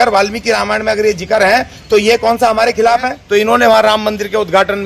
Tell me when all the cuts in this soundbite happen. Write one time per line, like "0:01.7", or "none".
0:03.2